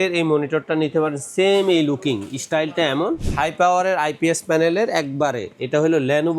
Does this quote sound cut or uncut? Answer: cut